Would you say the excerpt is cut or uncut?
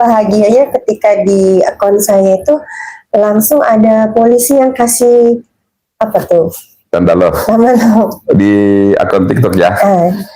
uncut